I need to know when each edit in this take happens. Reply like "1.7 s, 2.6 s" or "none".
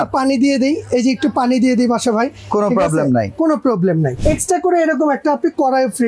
4.1 s